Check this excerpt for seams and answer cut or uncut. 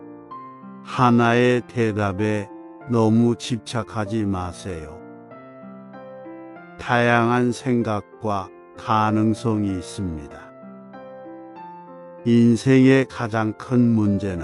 uncut